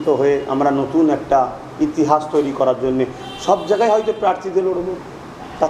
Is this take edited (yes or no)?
no